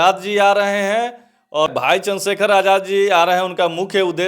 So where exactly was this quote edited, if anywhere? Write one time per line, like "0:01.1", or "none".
0:01.7